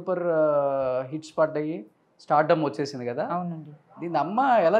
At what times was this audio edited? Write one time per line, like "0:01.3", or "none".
none